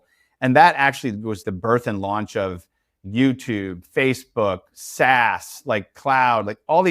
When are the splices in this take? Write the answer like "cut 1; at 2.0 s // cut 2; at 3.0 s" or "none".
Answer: cut 1; at 1.4 s